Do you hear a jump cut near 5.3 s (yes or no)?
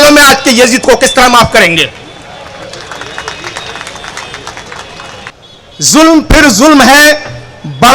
yes